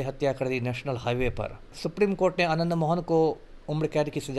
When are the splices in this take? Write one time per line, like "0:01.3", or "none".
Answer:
0:01.8